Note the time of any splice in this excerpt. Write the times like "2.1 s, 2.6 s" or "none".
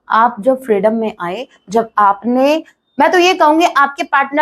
none